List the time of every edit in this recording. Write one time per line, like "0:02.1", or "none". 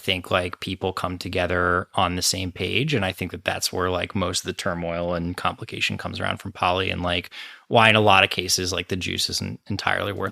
none